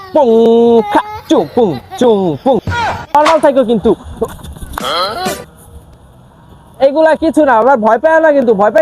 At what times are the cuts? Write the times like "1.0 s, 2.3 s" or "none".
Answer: 3.1 s